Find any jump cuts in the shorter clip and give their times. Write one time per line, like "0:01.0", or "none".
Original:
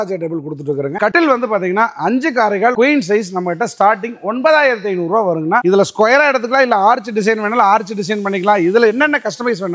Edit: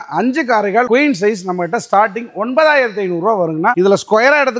none